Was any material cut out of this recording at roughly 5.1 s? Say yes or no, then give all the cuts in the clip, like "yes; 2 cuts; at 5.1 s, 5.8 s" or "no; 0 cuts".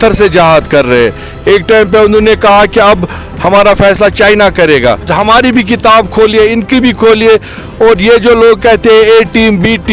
yes; 1 cut; at 5.1 s